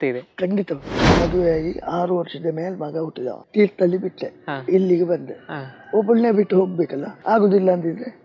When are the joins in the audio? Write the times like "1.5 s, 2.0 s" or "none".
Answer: 1.1 s, 3.4 s, 7.1 s